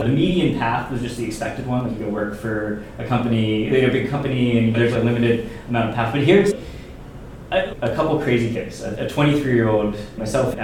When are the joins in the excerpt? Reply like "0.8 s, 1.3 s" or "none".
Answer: none